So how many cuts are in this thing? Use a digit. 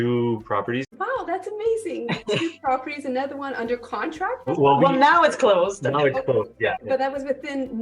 3